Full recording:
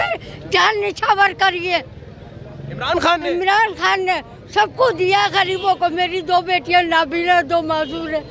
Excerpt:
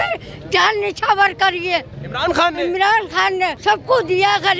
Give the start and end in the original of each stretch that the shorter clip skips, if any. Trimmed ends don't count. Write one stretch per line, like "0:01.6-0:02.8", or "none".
0:02.0-0:02.7
0:04.2-0:04.5